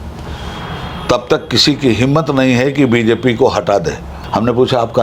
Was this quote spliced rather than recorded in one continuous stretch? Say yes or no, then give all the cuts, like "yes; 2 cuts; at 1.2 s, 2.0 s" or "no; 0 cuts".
yes; 1 cut; at 4.1 s